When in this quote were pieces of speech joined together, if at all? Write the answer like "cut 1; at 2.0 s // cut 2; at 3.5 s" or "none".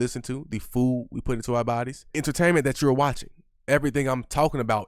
cut 1; at 2.0 s // cut 2; at 3.5 s